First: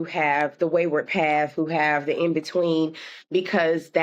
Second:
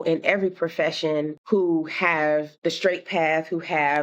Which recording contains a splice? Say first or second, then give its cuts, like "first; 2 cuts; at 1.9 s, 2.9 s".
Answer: second; 2 cuts; at 1.4 s, 2.5 s